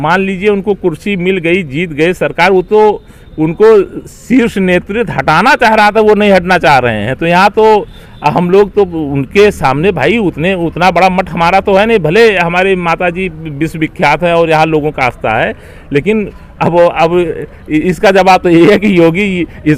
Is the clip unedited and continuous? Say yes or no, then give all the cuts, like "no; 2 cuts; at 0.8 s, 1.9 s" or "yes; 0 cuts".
yes; 0 cuts